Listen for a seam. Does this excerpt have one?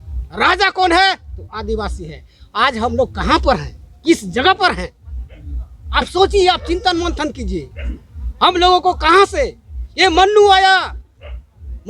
no; 0 cuts

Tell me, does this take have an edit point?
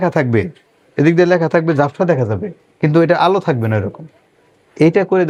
no; 0 cuts

